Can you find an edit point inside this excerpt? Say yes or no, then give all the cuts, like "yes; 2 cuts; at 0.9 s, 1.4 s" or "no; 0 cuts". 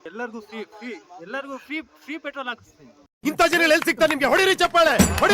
yes; 1 cut; at 1.0 s